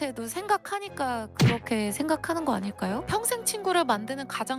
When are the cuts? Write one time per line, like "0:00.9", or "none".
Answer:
0:03.1